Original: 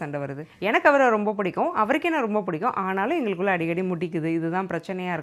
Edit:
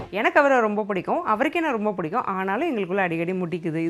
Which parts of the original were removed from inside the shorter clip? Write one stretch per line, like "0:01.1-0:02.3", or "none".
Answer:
none